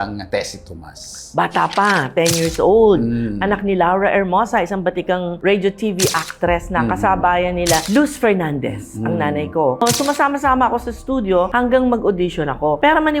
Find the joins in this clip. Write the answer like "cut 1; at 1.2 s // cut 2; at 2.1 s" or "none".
none